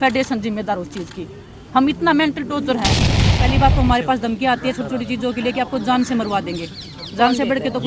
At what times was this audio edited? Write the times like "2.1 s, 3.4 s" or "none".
3.3 s